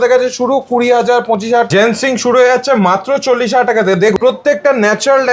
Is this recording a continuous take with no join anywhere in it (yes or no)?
no